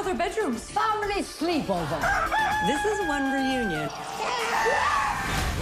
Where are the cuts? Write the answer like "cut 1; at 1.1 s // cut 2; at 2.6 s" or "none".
cut 1; at 3.9 s

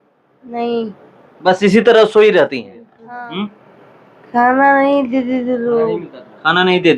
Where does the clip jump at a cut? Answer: cut 1; at 2.9 s

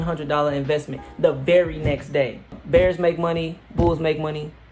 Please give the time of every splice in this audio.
cut 1; at 2.6 s

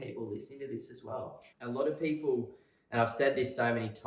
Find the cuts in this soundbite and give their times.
cut 1; at 1.5 s

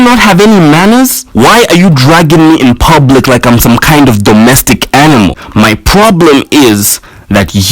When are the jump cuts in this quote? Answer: cut 1; at 5.4 s

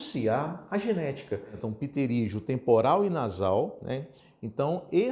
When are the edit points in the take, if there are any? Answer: cut 1; at 1.6 s

